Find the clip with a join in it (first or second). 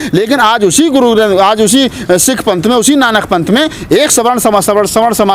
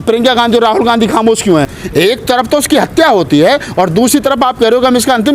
second